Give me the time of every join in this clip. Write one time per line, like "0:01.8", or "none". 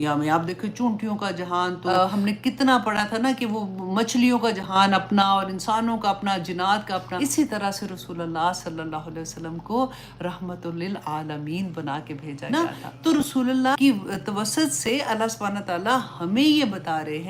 0:01.8
0:07.1
0:12.4
0:13.7

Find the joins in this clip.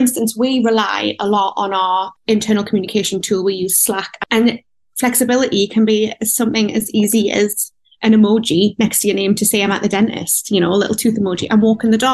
none

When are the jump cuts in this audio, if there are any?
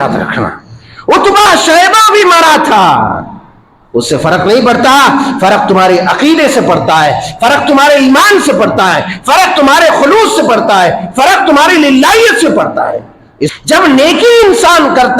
0:13.5

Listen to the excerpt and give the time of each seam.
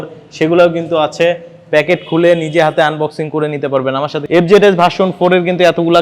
0:04.2

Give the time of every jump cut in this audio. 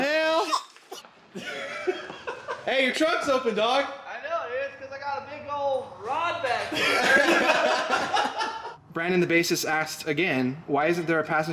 0:02.6
0:08.7

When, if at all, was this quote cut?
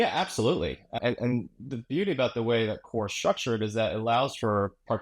0:01.0

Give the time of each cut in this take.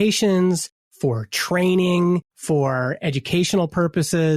0:02.3

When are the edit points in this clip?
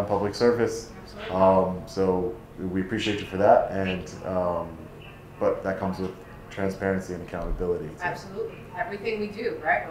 none

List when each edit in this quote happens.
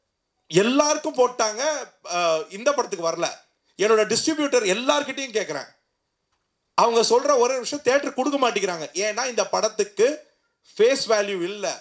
none

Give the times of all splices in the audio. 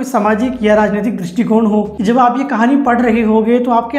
0:01.9

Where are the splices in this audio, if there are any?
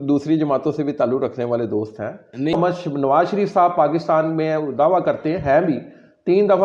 0:02.6

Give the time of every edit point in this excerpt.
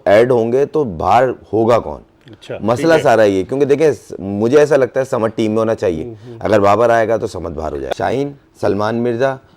0:07.8

